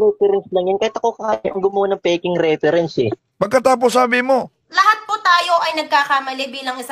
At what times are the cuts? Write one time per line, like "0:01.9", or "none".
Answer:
0:03.2
0:04.6

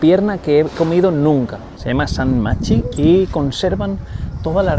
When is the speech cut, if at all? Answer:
0:01.8

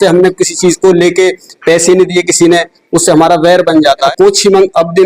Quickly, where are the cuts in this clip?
0:04.1

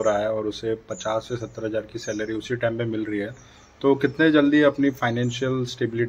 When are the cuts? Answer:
none

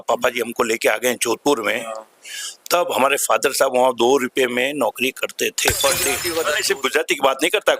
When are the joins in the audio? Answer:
0:06.3

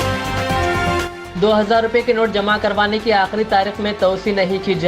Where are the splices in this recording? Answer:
0:01.2

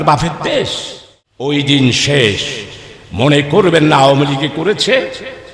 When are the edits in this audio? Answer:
0:01.5
0:04.4

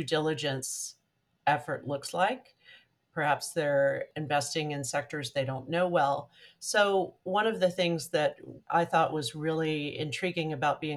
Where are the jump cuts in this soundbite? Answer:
0:04.1
0:08.6

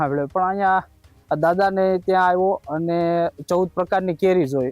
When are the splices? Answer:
none

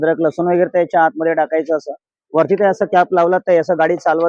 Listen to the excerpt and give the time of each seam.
none

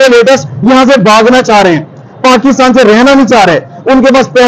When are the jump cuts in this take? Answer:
none

